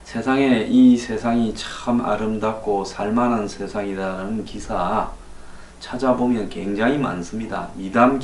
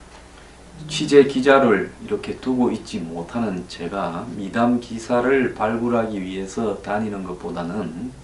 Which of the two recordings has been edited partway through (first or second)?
first